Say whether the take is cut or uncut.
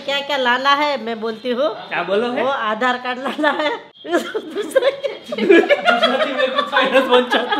cut